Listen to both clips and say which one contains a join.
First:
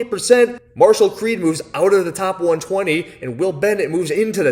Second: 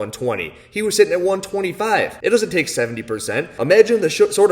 second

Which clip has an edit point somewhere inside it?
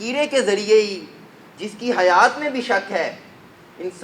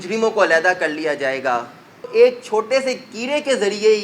second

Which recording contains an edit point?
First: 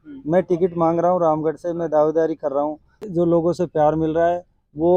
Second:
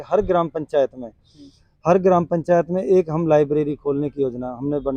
first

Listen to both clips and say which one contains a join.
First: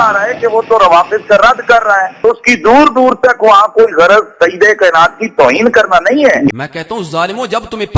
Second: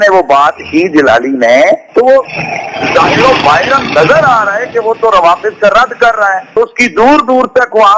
first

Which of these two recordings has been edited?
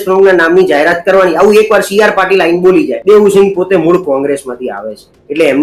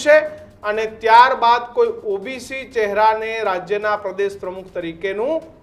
first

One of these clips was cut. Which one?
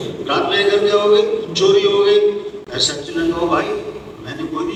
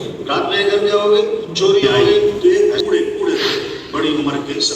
second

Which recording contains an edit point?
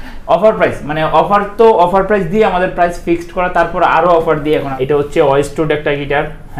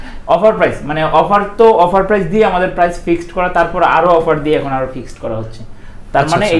first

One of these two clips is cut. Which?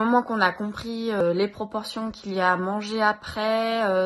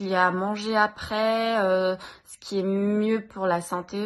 first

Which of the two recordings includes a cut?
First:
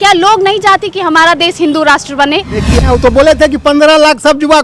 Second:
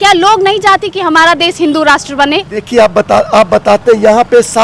first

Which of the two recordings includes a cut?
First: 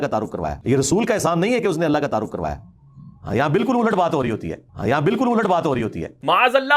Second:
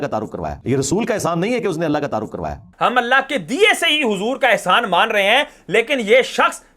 second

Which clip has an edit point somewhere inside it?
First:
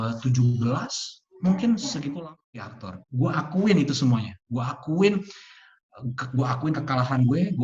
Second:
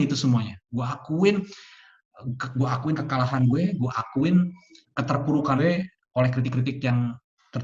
first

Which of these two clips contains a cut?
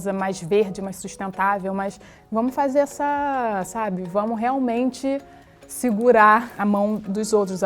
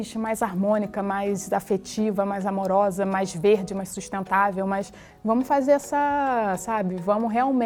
first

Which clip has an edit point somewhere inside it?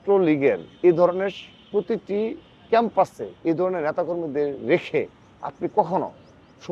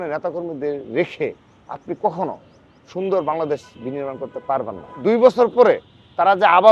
second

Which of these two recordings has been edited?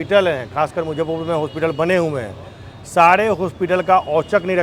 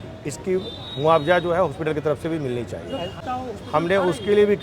second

